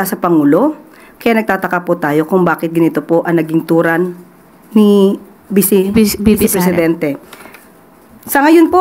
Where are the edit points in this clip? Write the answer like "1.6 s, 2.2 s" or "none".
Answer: none